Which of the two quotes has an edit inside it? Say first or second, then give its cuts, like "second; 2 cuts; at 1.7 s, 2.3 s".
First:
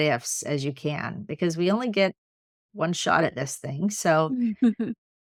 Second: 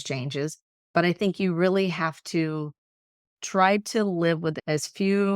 second; 2 cuts; at 0.9 s, 4.6 s